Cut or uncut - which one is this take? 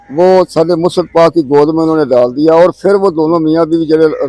uncut